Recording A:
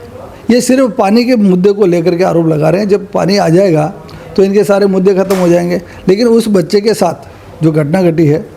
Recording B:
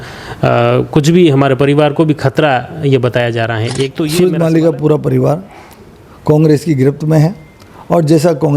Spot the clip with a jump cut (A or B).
B